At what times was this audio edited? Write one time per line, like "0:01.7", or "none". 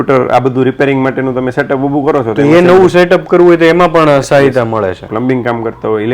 0:05.0